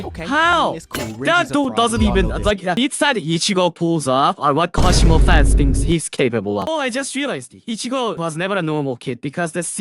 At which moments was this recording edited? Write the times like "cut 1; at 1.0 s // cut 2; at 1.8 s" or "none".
cut 1; at 6.7 s

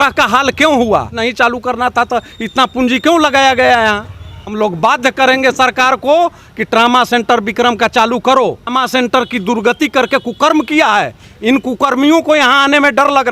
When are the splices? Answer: cut 1; at 1.2 s // cut 2; at 4.1 s // cut 3; at 8.7 s

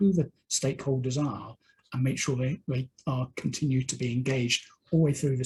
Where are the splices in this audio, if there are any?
none

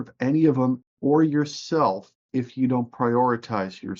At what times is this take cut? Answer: none

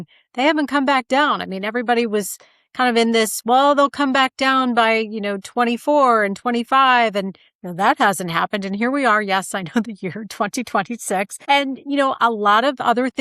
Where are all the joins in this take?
cut 1; at 11.4 s

